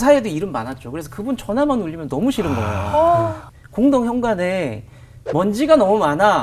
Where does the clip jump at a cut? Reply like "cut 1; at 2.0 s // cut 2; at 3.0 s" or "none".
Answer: cut 1; at 3.4 s